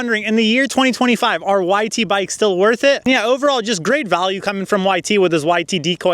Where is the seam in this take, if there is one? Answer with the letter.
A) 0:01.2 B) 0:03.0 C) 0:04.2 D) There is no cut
D